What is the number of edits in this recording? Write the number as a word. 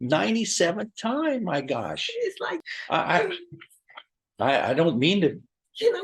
one